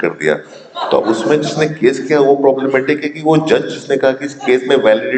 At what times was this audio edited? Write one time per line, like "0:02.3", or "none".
none